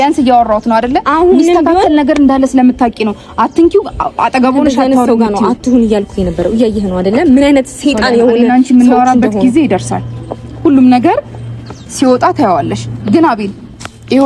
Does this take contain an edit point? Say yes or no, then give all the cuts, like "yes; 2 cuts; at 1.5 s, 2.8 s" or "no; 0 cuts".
no; 0 cuts